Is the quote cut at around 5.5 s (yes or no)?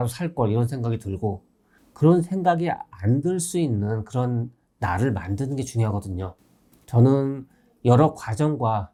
no